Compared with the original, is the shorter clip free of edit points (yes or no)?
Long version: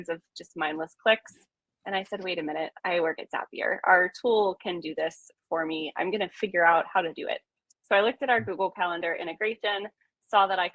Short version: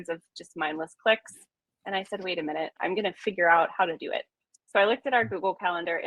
no